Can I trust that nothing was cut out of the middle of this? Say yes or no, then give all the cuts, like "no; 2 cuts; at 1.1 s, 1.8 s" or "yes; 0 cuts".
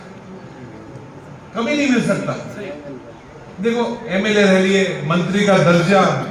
yes; 0 cuts